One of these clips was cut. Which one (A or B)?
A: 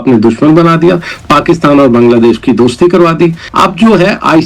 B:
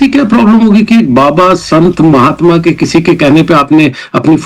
A